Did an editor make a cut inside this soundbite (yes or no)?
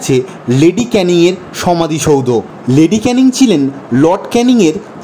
no